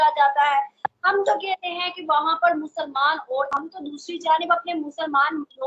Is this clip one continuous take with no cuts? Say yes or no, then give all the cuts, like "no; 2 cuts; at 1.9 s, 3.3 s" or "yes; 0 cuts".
no; 1 cut; at 3.5 s